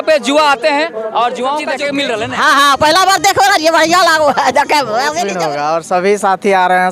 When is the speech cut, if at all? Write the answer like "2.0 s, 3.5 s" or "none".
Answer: 1.9 s, 5.3 s

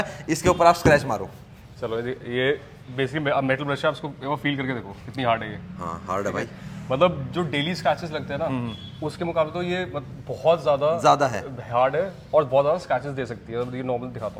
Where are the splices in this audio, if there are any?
none

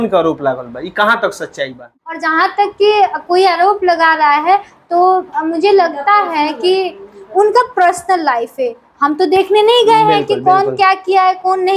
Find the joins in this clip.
2.0 s

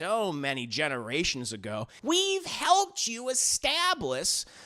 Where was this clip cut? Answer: 1.9 s

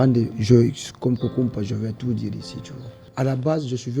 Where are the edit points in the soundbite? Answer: 3.0 s

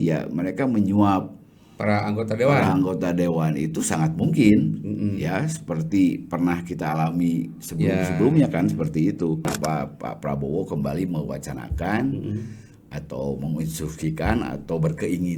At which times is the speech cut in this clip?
9.4 s

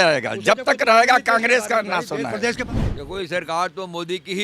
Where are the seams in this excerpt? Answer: 2.6 s

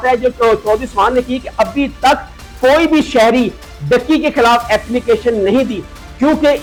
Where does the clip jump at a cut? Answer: none

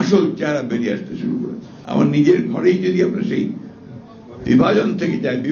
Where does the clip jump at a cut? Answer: 1.7 s

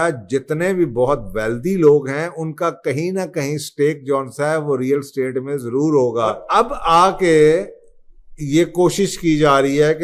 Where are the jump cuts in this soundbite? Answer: 6.4 s

